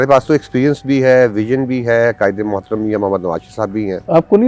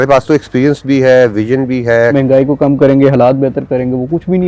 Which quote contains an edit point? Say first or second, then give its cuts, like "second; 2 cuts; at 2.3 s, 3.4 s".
second; 1 cut; at 2.1 s